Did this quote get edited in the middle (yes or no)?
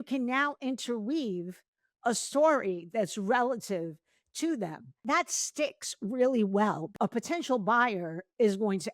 yes